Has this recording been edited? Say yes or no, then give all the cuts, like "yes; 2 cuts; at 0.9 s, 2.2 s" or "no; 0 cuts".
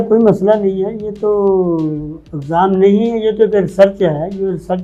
no; 0 cuts